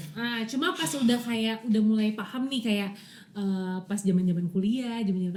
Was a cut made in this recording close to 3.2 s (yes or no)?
no